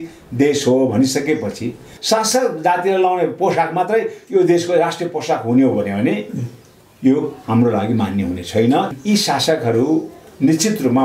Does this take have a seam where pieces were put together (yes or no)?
yes